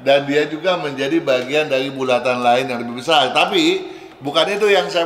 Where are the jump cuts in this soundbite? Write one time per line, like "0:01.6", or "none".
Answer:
none

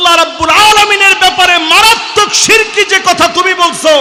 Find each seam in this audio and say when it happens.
none

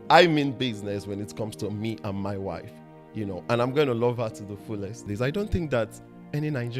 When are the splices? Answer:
0:05.1

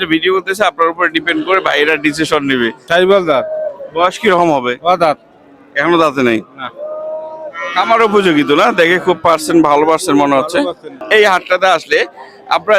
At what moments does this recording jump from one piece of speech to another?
0:02.8
0:11.0

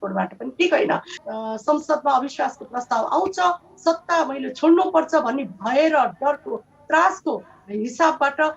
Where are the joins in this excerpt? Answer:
0:01.1

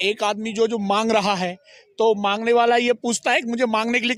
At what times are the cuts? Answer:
none

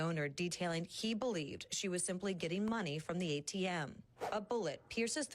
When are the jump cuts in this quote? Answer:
0:04.1

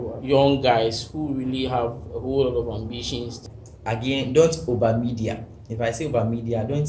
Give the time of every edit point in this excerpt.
0:03.4

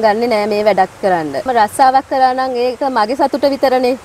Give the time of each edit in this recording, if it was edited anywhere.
0:01.5

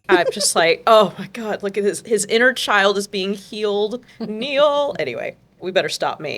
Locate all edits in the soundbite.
0:04.1
0:05.3

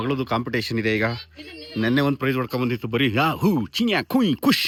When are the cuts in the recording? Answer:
none

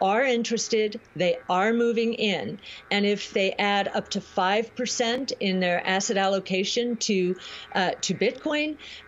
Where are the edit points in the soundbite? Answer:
0:03.3

